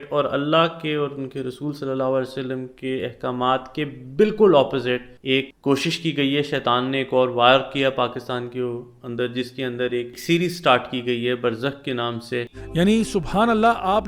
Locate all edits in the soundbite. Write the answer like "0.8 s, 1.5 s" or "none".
10.2 s, 12.6 s